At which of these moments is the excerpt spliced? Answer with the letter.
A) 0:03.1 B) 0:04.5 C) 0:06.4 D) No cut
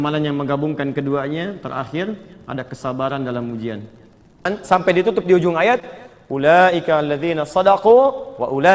B